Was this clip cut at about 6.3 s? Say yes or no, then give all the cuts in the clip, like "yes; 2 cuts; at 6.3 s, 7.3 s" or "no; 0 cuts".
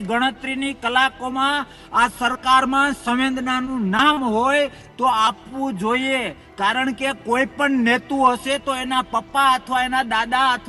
no; 0 cuts